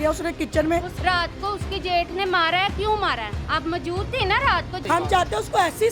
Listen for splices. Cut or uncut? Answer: cut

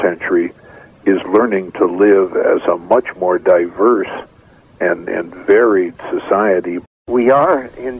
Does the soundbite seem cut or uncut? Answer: cut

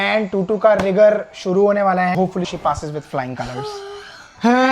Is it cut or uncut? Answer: cut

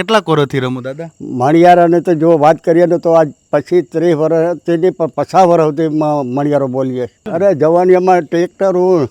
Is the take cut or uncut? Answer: cut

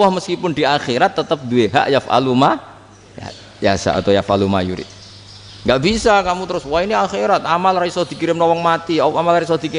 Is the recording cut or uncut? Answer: uncut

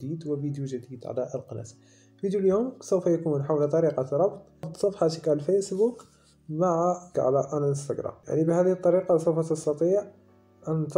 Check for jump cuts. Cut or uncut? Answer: cut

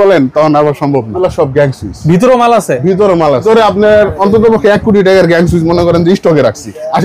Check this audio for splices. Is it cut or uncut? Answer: cut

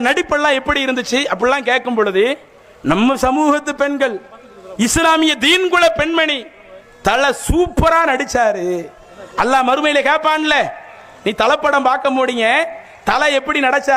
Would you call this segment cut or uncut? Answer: uncut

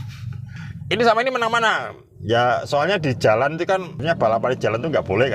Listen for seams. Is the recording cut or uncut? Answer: cut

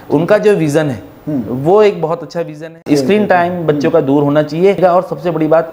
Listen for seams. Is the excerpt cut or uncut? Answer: cut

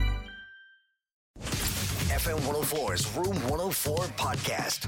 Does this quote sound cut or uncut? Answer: cut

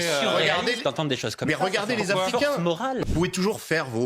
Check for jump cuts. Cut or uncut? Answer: cut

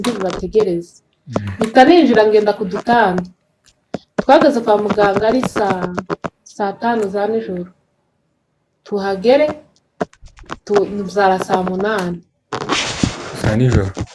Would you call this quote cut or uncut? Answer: uncut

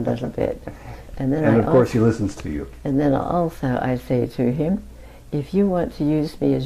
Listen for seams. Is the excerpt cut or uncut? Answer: uncut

